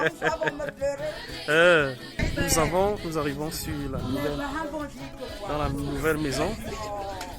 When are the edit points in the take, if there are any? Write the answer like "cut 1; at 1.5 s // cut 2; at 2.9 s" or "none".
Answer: cut 1; at 2.3 s

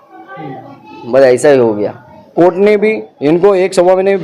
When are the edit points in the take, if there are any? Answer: cut 1; at 2.3 s

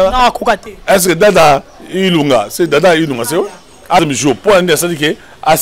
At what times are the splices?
cut 1; at 4.0 s

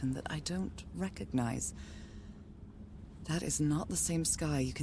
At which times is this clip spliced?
cut 1; at 1.6 s // cut 2; at 3.3 s

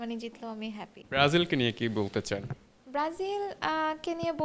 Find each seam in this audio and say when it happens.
cut 1; at 0.9 s

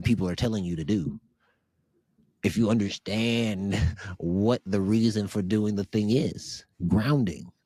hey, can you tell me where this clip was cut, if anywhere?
none

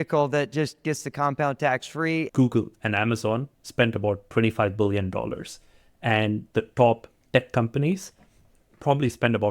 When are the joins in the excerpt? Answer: cut 1; at 2.3 s

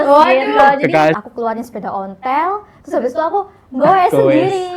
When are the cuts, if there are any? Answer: cut 1; at 1.2 s

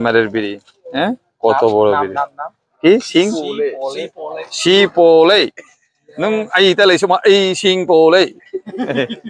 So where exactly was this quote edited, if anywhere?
none

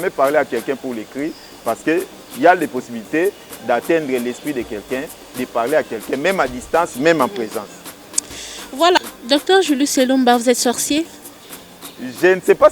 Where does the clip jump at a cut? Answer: cut 1; at 9.0 s

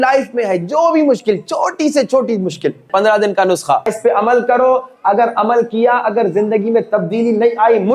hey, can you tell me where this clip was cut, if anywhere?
cut 1; at 2.9 s // cut 2; at 3.9 s

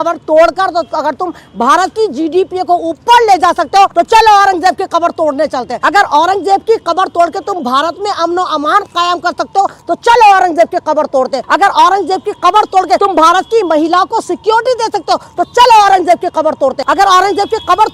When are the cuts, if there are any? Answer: cut 1; at 3.9 s // cut 2; at 5.7 s // cut 3; at 11.4 s // cut 4; at 13.0 s // cut 5; at 16.8 s

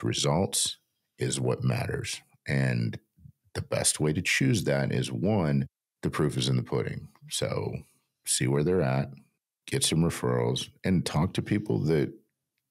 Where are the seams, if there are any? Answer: none

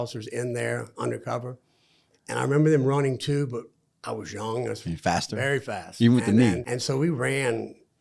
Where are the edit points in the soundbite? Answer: cut 1; at 6.7 s

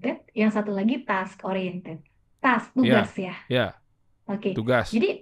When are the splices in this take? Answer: none

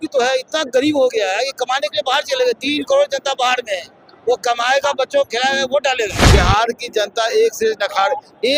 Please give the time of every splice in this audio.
cut 1; at 6.2 s

